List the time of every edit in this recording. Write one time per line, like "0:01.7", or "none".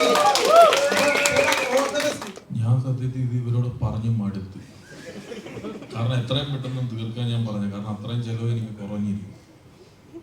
0:02.3